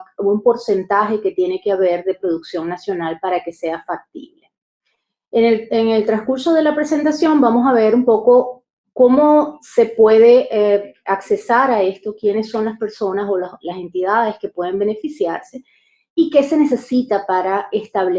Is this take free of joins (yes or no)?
no